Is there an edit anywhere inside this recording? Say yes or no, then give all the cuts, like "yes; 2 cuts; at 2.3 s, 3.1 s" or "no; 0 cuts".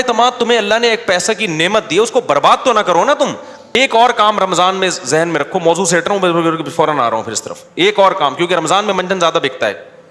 yes; 1 cut; at 3.8 s